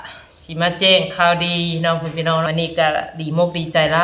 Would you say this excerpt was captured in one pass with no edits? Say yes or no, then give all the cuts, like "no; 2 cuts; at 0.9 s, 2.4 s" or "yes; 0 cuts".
no; 1 cut; at 2.4 s